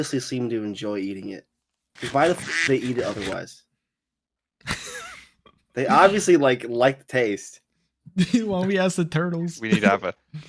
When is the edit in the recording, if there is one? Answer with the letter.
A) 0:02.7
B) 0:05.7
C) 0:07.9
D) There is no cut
D